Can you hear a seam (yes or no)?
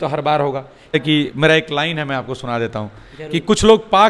yes